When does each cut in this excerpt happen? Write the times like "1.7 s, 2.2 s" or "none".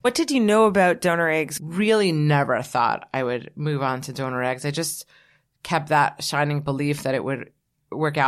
1.5 s